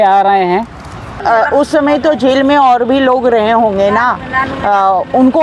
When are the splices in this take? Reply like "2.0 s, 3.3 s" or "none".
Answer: 1.2 s